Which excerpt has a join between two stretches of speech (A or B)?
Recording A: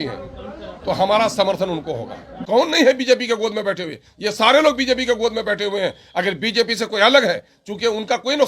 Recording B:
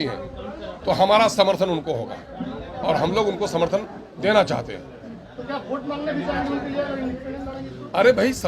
A